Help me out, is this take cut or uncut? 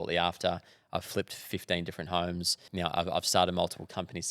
cut